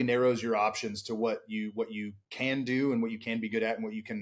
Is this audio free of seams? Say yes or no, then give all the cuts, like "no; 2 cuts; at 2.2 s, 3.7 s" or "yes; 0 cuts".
yes; 0 cuts